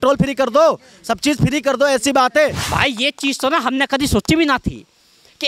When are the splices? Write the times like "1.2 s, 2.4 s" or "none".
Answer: 2.6 s